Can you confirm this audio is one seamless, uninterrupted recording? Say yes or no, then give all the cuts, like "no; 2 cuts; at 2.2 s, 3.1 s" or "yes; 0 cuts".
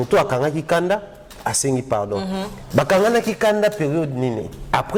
yes; 0 cuts